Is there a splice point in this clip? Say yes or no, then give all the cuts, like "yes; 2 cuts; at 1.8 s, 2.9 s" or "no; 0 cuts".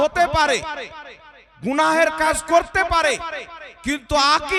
no; 0 cuts